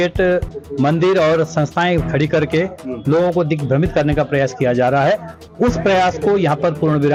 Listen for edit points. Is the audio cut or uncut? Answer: uncut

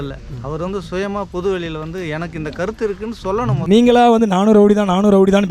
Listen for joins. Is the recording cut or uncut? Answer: cut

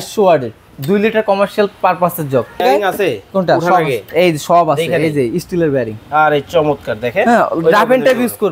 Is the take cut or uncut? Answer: cut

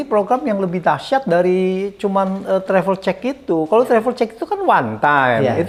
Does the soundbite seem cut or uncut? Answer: uncut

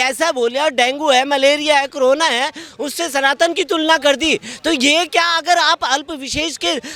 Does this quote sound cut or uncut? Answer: uncut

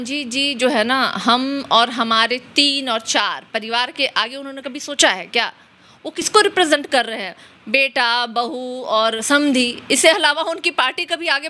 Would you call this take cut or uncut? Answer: uncut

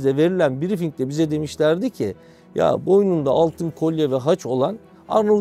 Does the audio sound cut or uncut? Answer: uncut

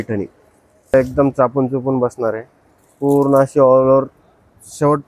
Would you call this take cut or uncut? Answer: cut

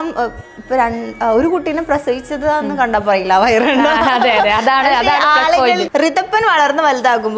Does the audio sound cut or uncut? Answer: cut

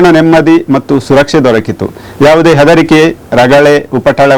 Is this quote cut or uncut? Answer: uncut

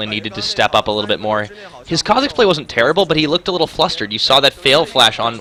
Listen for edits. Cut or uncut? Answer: uncut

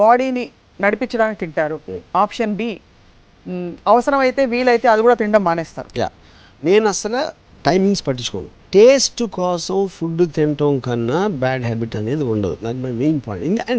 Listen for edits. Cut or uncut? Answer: cut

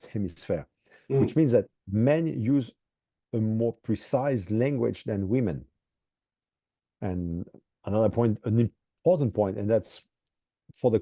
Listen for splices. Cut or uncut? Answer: uncut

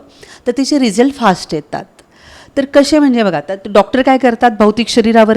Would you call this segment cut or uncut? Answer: uncut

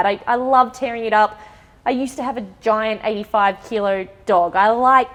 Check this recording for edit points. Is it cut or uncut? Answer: uncut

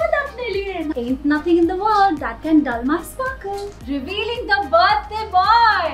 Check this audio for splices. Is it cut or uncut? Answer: cut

